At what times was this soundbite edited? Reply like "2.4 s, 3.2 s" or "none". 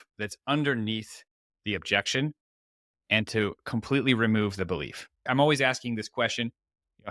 5.2 s